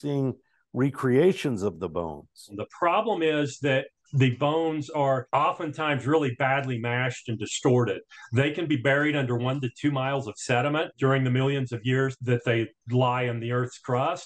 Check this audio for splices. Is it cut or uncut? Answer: cut